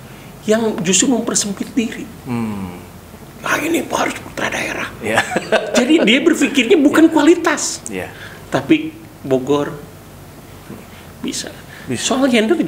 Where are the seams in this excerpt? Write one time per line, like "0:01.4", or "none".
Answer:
none